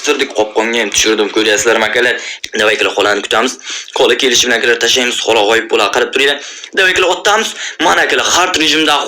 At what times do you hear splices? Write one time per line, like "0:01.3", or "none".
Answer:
0:02.3